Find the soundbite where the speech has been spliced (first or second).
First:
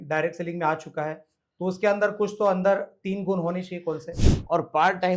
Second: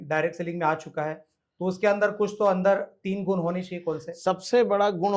first